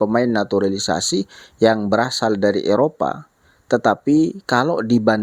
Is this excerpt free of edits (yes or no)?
yes